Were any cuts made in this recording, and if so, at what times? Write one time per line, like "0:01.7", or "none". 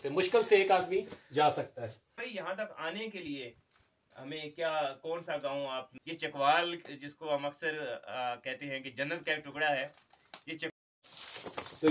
0:02.2
0:06.0
0:10.7